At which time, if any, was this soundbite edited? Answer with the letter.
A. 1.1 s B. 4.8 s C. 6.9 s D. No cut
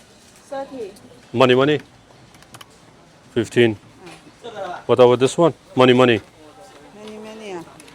A